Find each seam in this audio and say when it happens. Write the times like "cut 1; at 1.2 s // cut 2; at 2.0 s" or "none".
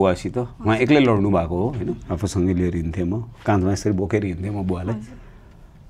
cut 1; at 2.0 s